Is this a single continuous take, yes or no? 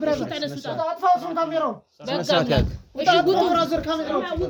yes